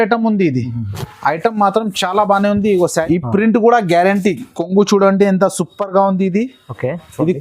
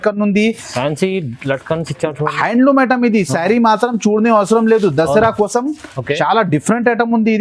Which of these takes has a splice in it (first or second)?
first